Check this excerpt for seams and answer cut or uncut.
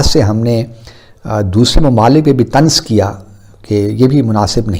uncut